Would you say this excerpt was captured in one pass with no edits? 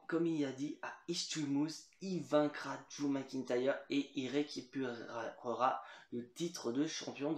yes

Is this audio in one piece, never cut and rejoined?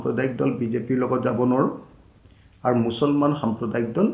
yes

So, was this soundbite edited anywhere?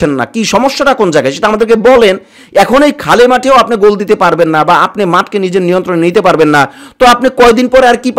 no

